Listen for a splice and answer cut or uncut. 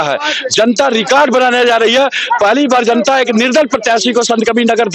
uncut